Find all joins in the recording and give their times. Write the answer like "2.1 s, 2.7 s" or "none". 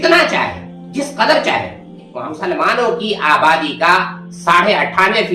2.3 s